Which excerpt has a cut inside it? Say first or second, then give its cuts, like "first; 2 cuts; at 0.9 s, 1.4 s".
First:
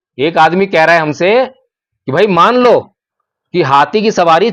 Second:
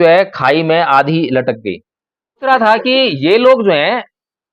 second; 1 cut; at 2.5 s